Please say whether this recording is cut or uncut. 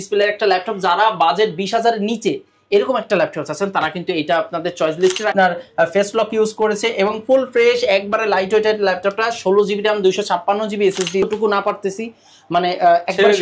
cut